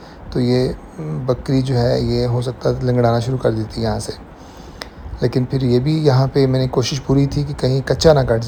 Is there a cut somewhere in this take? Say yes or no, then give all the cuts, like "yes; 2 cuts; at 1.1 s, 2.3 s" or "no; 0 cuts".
no; 0 cuts